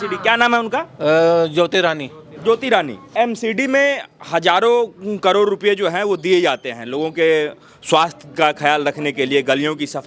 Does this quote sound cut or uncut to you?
cut